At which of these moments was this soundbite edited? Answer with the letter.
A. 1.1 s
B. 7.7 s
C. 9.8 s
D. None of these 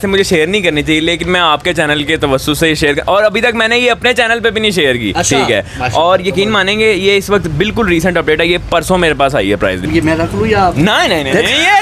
C